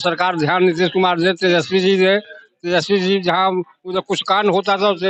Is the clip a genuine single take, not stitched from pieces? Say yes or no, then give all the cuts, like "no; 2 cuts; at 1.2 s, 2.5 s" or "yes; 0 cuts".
yes; 0 cuts